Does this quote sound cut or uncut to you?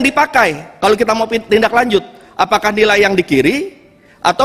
uncut